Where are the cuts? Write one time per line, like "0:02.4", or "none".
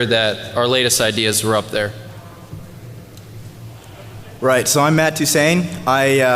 0:05.2